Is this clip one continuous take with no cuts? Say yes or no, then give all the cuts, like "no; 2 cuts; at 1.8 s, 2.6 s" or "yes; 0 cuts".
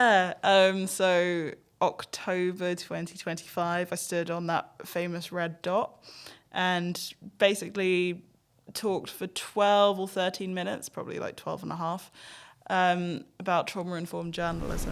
yes; 0 cuts